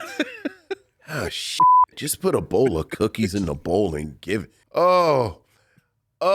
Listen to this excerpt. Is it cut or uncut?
cut